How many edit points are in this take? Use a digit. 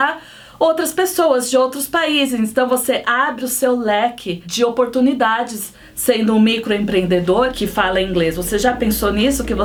0